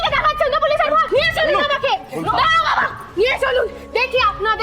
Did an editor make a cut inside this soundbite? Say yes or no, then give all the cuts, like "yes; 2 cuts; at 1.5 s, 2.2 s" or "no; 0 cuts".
yes; 1 cut; at 1.0 s